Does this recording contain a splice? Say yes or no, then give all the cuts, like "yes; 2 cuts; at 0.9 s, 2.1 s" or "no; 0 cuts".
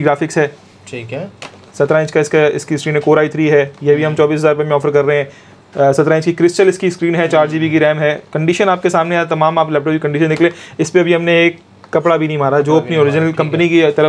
no; 0 cuts